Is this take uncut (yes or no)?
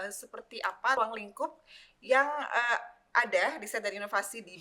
no